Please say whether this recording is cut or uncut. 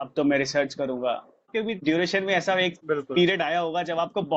cut